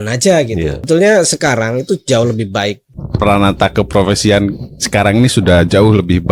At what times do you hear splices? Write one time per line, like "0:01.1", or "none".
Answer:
0:00.9
0:03.0